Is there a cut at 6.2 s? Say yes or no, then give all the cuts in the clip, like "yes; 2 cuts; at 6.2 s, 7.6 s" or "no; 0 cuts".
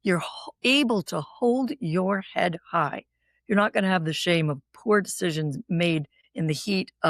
yes; 1 cut; at 6.2 s